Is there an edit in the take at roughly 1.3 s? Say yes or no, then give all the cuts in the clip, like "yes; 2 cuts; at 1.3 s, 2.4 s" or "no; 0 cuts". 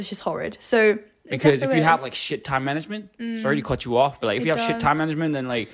yes; 1 cut; at 1.3 s